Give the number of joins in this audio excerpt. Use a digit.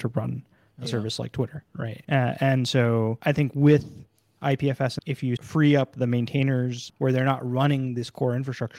4